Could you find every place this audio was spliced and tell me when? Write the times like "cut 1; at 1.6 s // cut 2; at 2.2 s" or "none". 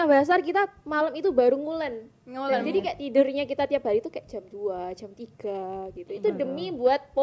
none